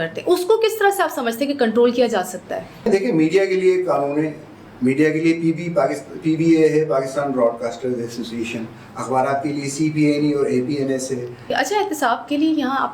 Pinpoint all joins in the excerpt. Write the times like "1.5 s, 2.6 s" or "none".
2.9 s, 11.5 s